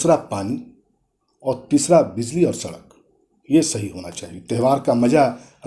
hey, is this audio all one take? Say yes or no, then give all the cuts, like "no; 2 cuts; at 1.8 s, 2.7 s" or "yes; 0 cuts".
yes; 0 cuts